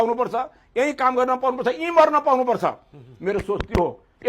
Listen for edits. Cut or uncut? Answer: uncut